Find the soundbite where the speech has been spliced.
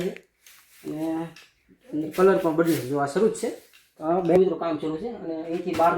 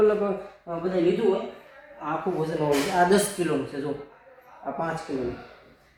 first; 1 cut; at 4.4 s

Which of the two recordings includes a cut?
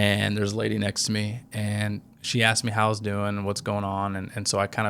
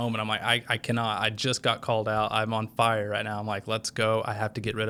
first; 1 cut; at 2.1 s

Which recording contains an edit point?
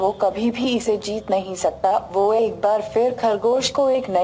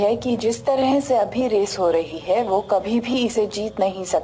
first; 1 cut; at 2.8 s

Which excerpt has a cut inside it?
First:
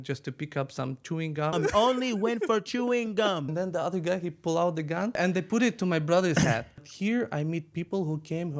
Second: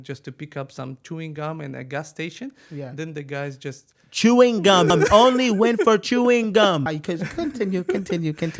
first; 4 cuts; at 1.5 s, 3.5 s, 5.2 s, 6.9 s

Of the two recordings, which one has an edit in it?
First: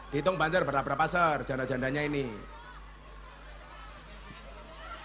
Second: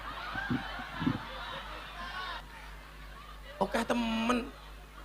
second; 1 cut; at 2.4 s

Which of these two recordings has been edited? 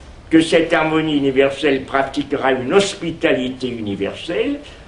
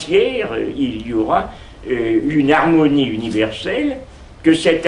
first; 1 cut; at 3.2 s

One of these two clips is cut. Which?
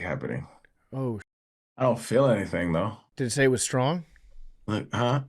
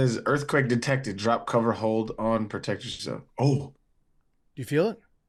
first; 2 cuts; at 1.3 s, 3.0 s

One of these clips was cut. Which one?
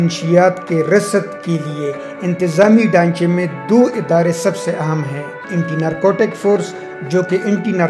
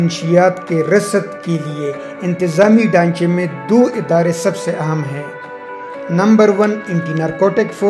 first; 1 cut; at 5.5 s

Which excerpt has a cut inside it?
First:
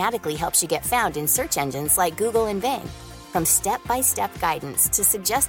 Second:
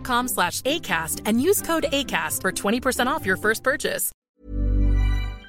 second; 1 cut; at 4.1 s

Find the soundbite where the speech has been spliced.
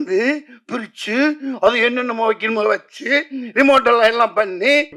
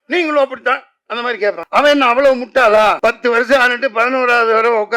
second; 2 cuts; at 1.6 s, 3.0 s

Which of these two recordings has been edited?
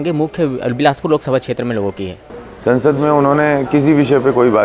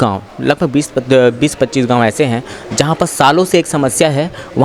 first; 1 cut; at 2.1 s

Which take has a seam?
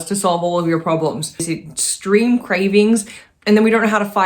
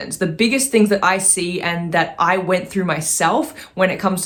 first; 1 cut; at 1.4 s

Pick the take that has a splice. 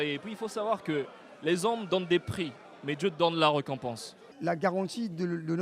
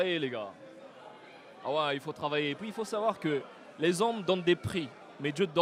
first; 1 cut; at 4.3 s

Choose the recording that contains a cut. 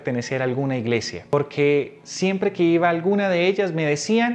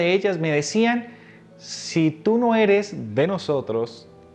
first; 1 cut; at 1.3 s

